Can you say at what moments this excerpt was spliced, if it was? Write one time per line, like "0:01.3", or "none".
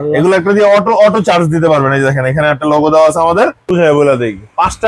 0:03.7